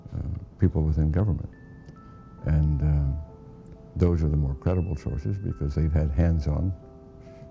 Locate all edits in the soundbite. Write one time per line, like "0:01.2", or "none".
0:02.1